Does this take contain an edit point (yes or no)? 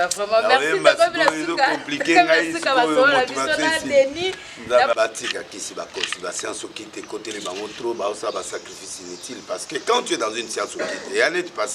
yes